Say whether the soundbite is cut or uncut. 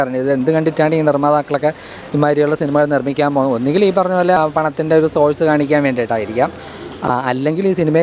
uncut